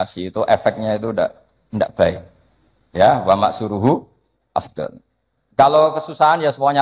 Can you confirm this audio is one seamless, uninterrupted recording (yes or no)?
yes